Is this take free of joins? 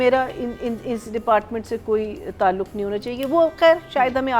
yes; 0 cuts

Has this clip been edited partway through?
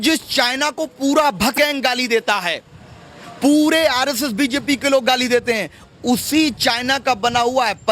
yes; 1 cut; at 1.6 s

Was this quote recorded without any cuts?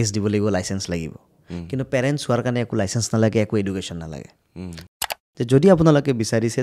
no; 1 cut; at 5.0 s

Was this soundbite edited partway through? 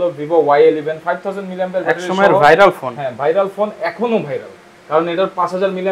no; 0 cuts

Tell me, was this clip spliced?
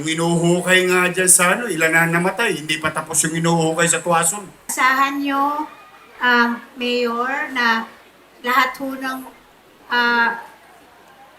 yes; 1 cut; at 4.6 s

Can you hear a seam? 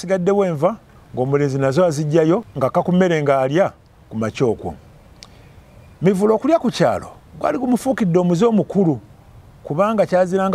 yes; 1 cut; at 2.5 s

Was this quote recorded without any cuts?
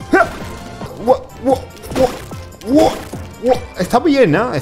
no; 1 cut; at 1.0 s

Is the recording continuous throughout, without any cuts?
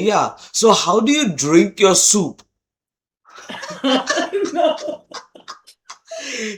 yes; 0 cuts

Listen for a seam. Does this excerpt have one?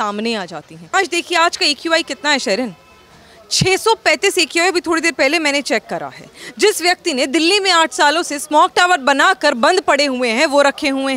yes; 1 cut; at 0.9 s

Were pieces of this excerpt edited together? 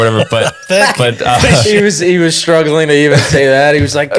no; 0 cuts

